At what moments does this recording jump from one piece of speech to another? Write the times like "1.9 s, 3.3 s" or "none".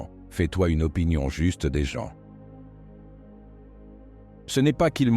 none

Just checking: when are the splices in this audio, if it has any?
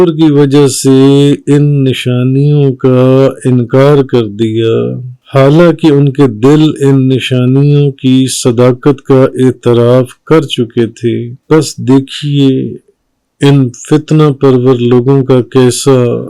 11.3 s

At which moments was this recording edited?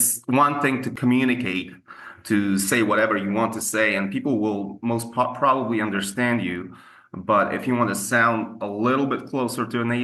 0.9 s

